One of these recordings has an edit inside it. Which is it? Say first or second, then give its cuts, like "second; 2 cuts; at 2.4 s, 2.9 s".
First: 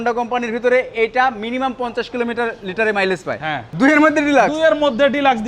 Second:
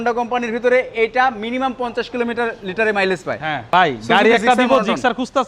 first; 1 cut; at 3.5 s